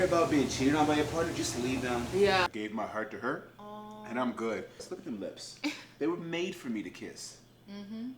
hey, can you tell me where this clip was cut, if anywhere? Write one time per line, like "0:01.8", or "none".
0:02.5
0:04.8